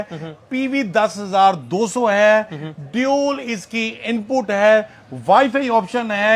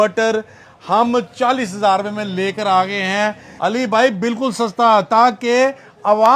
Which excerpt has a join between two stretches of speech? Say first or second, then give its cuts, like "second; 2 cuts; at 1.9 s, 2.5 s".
second; 1 cut; at 3.5 s